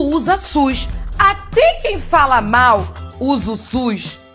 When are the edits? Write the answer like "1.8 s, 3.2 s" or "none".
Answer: none